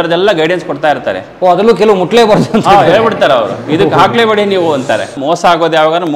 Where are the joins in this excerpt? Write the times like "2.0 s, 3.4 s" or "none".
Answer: 5.2 s